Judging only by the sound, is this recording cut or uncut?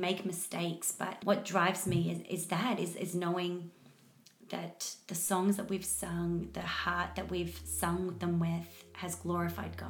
uncut